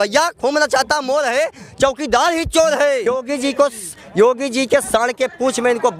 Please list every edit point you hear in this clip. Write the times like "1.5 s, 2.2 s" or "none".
3.1 s